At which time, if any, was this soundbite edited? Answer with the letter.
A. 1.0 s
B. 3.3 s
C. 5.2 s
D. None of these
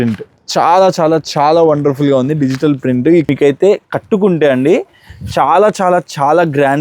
B